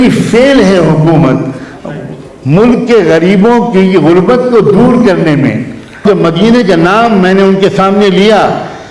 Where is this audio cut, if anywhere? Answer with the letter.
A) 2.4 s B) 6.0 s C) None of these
B